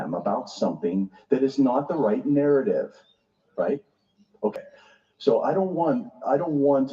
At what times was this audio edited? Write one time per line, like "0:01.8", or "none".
0:04.6